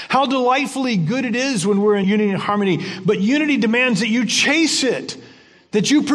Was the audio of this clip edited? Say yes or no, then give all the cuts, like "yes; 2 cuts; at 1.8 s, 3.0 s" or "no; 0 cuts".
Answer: yes; 1 cut; at 2.0 s